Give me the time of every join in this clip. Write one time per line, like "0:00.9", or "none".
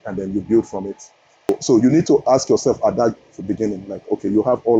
0:01.5